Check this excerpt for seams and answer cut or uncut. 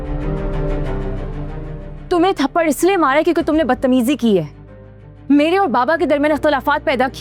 uncut